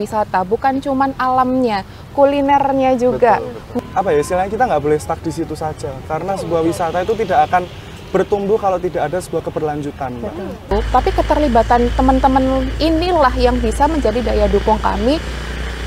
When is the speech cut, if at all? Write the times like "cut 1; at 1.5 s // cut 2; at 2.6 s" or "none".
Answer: cut 1; at 3.6 s // cut 2; at 10.7 s